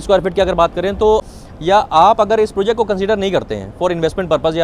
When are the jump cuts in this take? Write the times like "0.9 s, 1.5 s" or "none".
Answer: 1.2 s